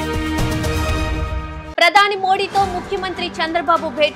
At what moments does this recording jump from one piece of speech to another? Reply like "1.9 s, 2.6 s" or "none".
1.6 s